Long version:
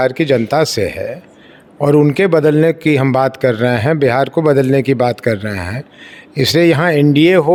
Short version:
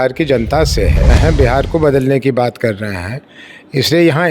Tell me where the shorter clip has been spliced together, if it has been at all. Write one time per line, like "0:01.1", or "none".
0:01.1

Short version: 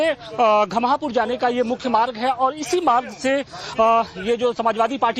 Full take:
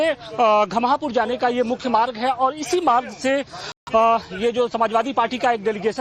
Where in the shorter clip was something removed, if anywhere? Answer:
0:03.6

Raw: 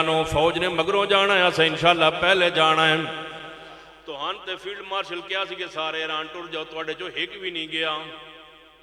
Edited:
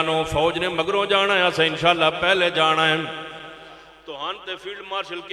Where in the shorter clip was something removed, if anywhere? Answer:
none

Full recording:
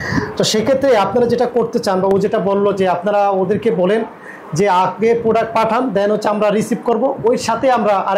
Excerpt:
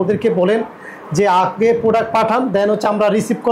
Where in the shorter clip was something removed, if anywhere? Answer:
none

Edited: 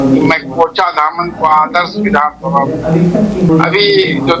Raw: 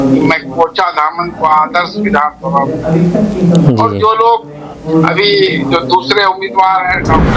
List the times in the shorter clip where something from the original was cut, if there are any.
0:03.5

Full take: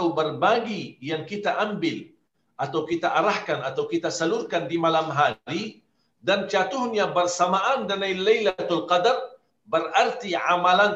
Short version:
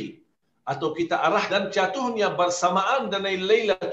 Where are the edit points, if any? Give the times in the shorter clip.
0:01.5

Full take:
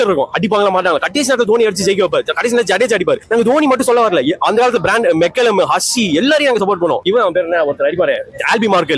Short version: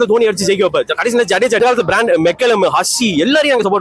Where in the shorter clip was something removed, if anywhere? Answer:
0:01.6

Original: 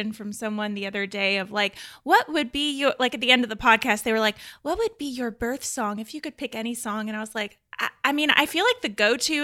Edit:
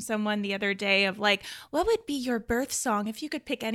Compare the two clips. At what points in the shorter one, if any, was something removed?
0:01.6

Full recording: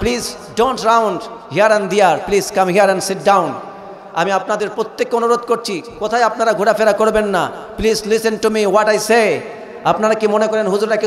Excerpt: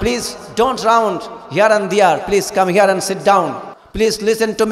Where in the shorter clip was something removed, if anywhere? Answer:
0:03.8

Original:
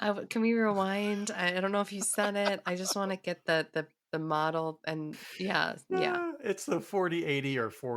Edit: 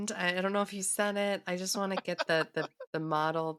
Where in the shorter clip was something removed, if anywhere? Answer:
none

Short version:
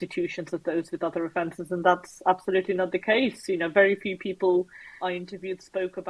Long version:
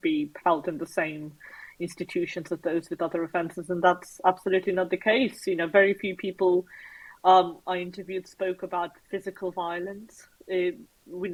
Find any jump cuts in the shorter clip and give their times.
0:04.9

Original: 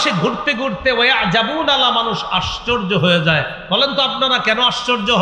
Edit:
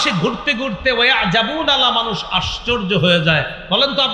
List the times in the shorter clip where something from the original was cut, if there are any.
none

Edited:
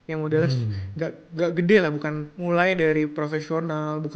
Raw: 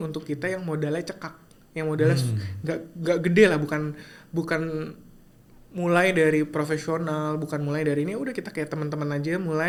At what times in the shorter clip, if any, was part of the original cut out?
0:02.3

